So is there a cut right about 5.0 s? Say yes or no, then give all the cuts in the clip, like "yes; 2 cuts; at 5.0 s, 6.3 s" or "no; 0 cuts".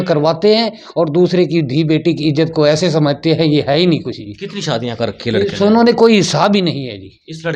no; 0 cuts